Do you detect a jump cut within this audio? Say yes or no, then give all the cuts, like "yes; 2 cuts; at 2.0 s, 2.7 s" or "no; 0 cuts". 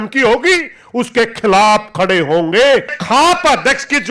yes; 1 cut; at 3.0 s